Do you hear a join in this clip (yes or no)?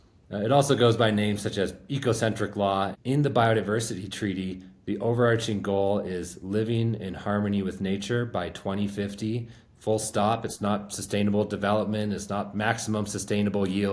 yes